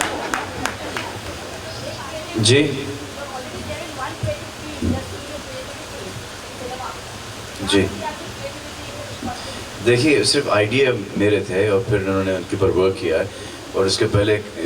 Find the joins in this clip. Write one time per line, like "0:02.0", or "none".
none